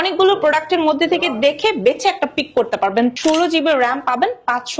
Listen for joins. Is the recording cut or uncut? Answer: cut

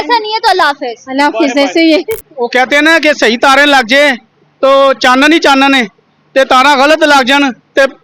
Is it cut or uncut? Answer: cut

